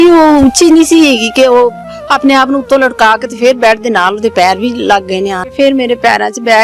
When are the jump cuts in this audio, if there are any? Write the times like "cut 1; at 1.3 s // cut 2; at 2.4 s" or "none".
cut 1; at 5.5 s